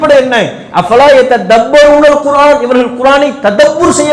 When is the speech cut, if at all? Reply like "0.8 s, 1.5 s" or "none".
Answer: none

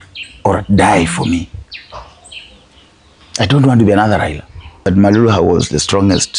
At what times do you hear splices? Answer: 4.9 s

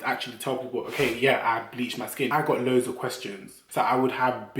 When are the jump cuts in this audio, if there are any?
2.3 s, 3.6 s

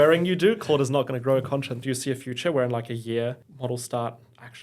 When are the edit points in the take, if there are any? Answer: 1.8 s, 3.5 s

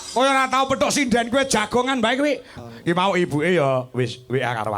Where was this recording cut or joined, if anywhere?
2.5 s

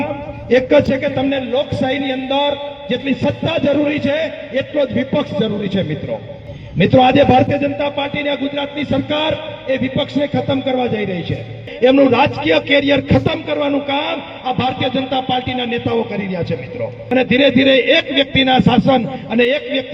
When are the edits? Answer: 11.6 s, 17.0 s

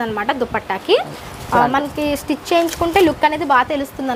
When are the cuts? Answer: none

